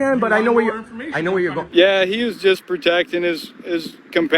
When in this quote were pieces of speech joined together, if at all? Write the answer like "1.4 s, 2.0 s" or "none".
1.6 s

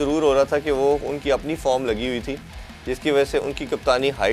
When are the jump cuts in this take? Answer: none

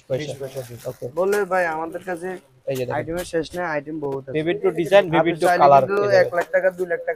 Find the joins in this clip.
none

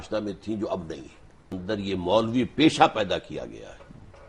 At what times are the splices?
1.6 s

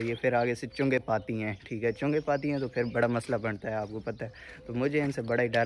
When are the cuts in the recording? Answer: none

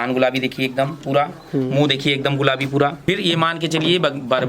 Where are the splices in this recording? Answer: 3.0 s

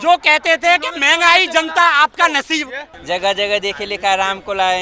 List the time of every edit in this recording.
2.9 s

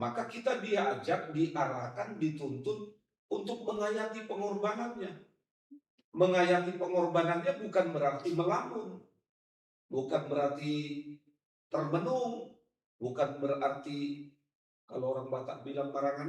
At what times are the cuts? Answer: none

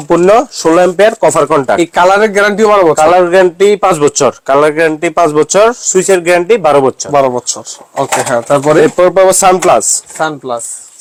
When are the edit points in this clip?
none

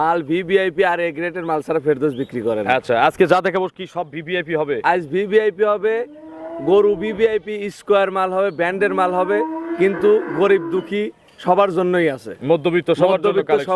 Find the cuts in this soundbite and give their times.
none

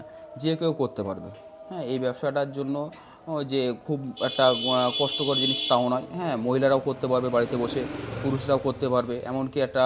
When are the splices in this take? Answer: none

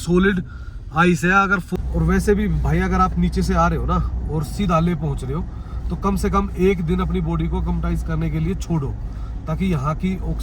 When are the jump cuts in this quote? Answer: 1.7 s

